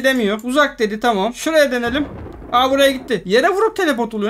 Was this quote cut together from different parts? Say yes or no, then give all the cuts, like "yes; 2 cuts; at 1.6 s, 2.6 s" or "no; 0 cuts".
no; 0 cuts